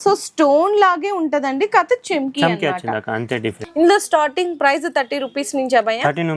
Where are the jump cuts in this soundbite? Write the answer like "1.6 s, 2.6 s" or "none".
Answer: 3.6 s